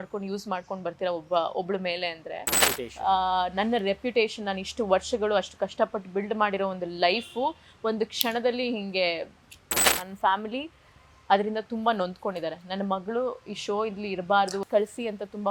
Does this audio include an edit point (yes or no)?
yes